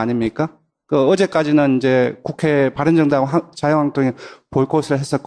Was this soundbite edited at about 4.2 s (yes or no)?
no